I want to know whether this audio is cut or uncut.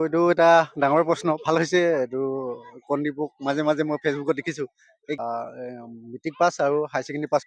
cut